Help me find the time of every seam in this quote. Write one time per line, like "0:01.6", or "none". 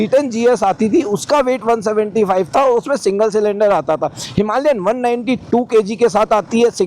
none